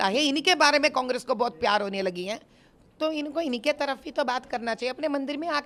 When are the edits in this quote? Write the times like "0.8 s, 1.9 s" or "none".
none